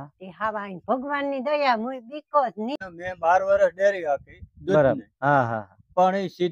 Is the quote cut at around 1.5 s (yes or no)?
no